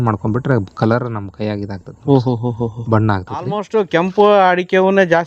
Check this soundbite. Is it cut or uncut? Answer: cut